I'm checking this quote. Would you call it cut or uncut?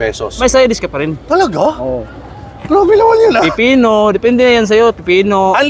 uncut